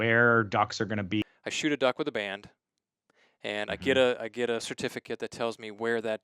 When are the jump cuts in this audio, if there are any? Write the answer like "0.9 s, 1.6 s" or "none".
1.2 s